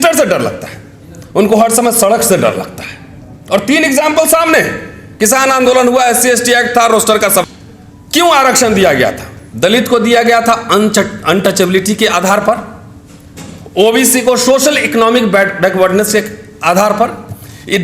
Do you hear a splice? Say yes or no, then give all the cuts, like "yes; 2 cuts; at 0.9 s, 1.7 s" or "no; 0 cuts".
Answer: yes; 1 cut; at 7.4 s